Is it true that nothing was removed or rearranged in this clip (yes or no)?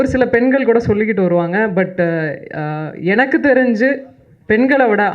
yes